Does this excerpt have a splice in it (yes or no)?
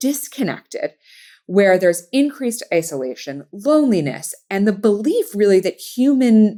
no